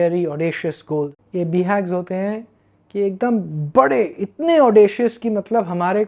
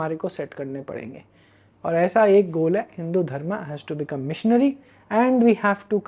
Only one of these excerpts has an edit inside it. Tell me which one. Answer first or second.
first